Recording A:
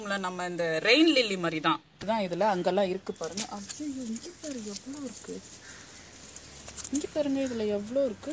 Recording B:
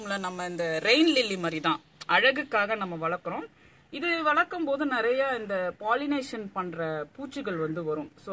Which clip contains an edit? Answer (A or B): A